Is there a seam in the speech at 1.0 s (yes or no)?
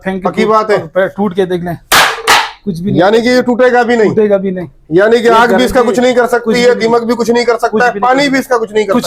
no